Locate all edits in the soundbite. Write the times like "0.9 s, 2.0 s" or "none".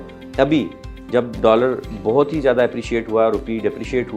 none

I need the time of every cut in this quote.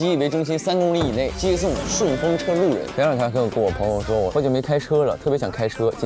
1.3 s, 2.9 s, 4.3 s

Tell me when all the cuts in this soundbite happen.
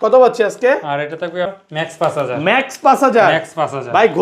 1.6 s

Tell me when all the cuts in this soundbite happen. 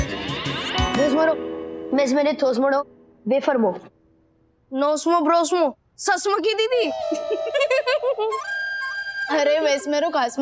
none

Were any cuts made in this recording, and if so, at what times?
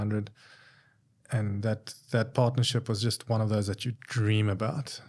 none

